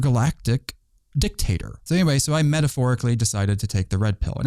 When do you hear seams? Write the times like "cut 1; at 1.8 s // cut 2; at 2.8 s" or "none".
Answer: cut 1; at 1.8 s